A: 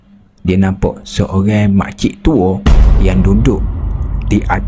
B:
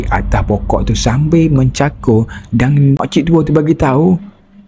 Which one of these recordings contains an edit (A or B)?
B